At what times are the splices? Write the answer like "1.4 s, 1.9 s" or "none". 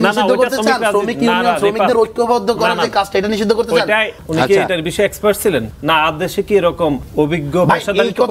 4.2 s, 5.7 s, 7.0 s